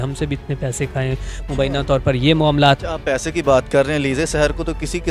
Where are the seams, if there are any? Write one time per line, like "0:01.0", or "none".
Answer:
0:02.8